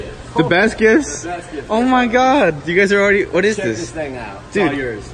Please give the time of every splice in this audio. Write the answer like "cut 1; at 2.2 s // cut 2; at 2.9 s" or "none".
none